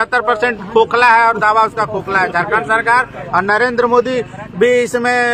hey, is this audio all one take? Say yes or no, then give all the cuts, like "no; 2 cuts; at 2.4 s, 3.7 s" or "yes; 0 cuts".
yes; 0 cuts